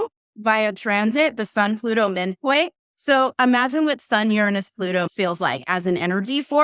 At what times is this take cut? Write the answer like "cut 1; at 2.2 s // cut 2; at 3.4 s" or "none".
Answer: cut 1; at 5.1 s